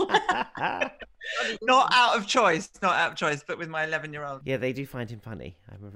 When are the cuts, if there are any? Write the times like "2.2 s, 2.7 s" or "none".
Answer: none